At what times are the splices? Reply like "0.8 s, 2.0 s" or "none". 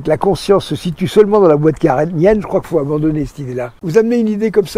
3.8 s